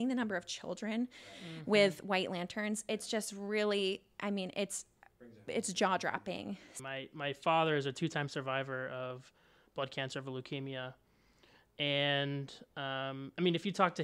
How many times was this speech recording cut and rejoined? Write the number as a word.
one